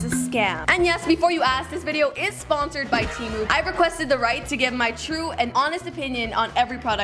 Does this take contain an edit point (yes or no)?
no